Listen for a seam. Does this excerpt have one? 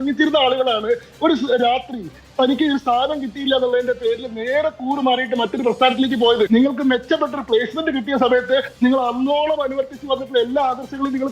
yes; 1 cut; at 6.5 s

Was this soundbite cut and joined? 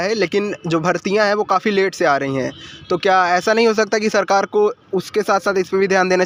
no; 0 cuts

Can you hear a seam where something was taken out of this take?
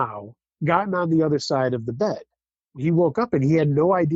no; 0 cuts

